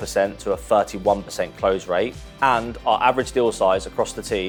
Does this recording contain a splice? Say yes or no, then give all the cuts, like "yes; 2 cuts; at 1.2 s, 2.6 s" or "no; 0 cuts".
no; 0 cuts